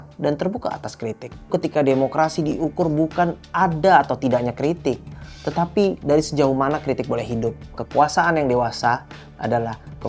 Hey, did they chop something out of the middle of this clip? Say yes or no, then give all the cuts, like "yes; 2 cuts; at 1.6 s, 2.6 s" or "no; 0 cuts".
yes; 2 cuts; at 1.5 s, 7.8 s